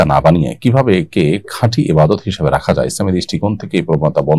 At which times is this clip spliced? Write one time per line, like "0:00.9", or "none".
none